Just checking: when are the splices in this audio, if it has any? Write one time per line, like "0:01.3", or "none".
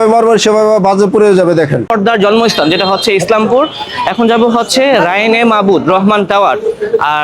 0:01.9